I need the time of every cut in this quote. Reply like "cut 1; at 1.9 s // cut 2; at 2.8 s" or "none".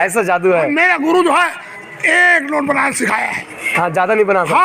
none